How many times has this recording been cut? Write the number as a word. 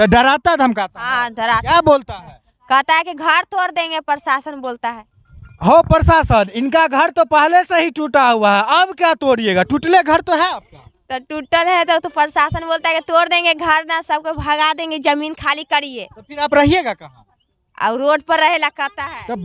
zero